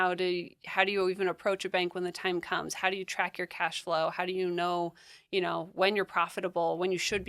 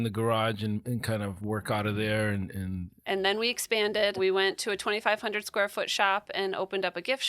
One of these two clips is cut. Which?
second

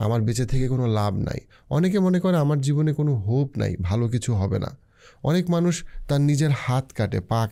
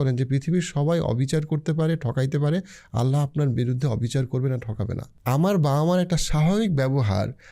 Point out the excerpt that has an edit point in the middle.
second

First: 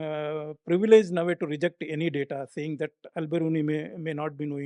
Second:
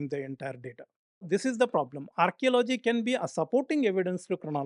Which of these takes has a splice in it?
second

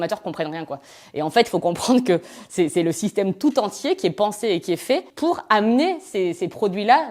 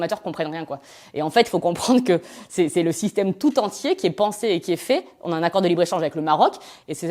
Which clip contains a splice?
first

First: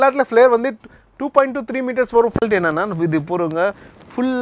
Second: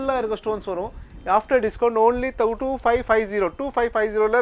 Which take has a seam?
first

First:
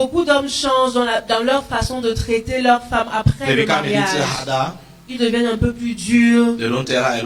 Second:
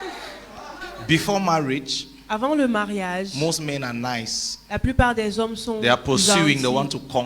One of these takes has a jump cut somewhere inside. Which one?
second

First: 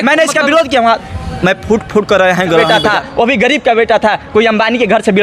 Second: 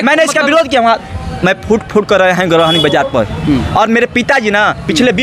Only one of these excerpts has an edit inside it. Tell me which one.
first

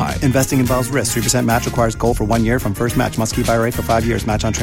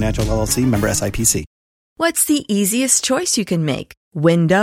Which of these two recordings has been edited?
second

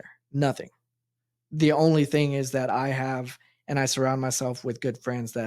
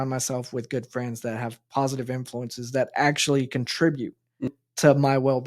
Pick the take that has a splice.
second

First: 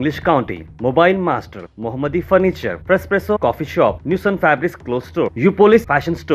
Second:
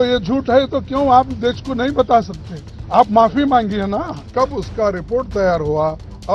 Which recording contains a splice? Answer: second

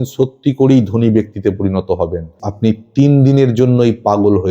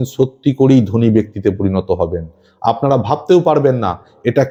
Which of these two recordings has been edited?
first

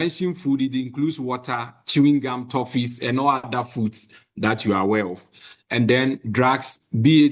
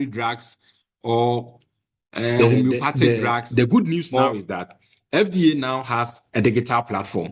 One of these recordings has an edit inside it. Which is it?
second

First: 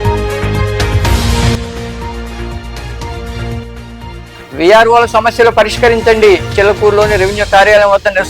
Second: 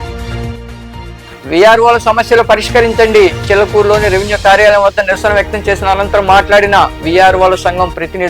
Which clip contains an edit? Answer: first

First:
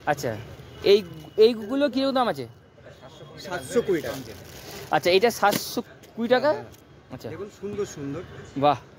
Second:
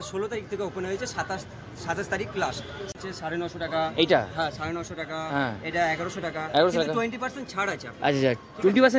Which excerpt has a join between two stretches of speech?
second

